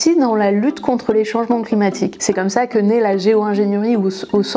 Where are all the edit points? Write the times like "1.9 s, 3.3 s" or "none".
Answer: none

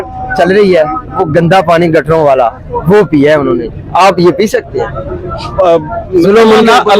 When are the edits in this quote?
none

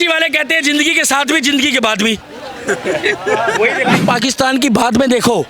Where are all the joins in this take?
4.0 s

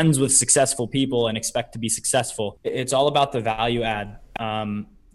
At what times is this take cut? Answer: 2.6 s

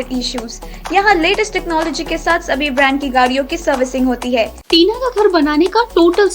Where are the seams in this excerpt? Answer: 4.6 s

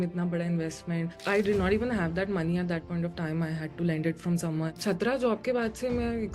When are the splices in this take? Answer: 1.2 s, 4.8 s

